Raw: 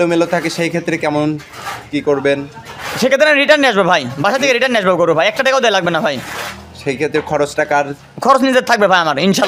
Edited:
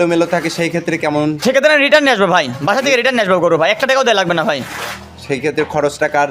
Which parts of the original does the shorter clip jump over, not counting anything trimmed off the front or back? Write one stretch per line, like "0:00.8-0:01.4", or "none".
0:01.4-0:02.9